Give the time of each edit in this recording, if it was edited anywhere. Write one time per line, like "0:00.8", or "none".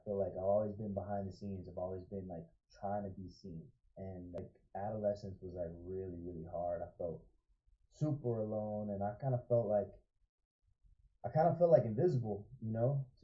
0:04.4